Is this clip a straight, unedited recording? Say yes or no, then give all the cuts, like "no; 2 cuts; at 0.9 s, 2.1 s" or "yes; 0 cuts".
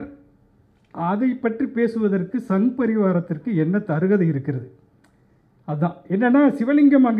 yes; 0 cuts